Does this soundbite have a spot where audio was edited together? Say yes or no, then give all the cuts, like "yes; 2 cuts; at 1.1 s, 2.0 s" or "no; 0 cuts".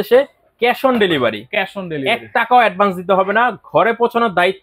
no; 0 cuts